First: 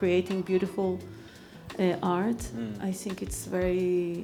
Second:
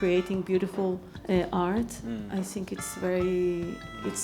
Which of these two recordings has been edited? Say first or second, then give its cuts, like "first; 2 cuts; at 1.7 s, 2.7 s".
second; 1 cut; at 1.1 s